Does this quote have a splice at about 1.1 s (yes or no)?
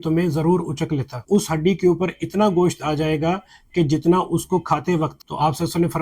yes